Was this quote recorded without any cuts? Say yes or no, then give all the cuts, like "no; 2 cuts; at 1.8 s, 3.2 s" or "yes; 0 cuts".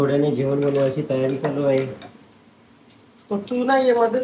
yes; 0 cuts